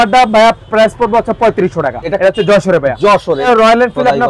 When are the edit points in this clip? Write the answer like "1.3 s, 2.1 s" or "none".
2.0 s, 3.5 s